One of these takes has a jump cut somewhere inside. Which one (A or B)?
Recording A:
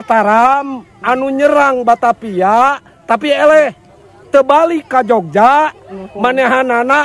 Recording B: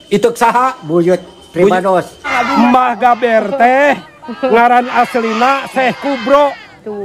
B